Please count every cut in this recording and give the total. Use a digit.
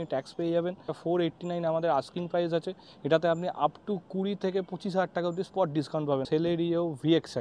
2